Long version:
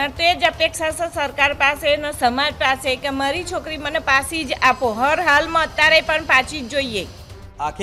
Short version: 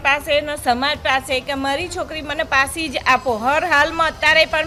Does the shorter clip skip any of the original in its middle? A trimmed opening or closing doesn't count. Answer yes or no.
no